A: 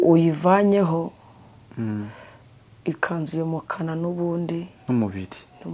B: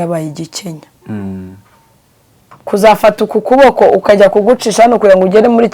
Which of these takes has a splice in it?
B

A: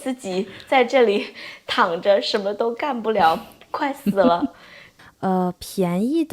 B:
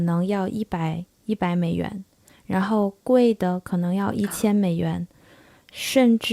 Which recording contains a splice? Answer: A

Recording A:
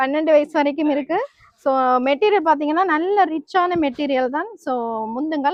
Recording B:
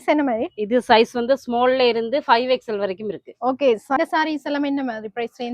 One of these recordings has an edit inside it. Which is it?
B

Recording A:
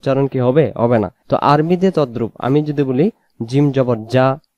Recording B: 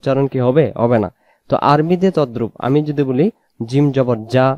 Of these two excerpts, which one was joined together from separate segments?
A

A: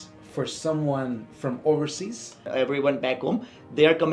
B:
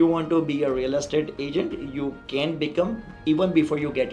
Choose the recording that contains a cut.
A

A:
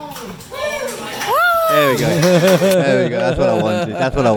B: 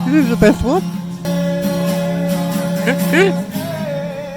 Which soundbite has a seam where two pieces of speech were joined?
B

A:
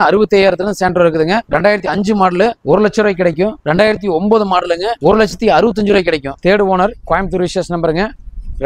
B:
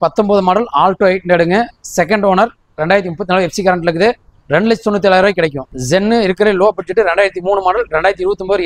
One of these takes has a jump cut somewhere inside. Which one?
A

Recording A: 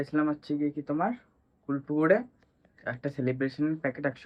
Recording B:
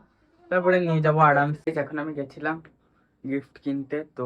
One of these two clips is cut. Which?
B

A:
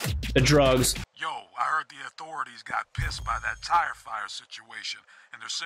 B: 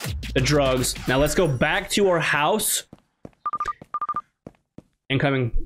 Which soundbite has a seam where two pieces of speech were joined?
A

